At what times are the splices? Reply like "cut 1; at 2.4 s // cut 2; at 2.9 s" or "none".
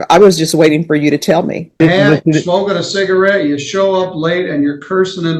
cut 1; at 1.8 s